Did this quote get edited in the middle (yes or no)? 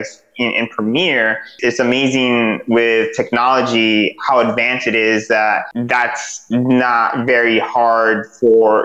yes